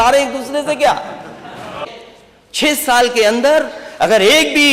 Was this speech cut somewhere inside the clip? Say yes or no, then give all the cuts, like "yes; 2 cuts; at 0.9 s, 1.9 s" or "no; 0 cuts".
yes; 1 cut; at 1.9 s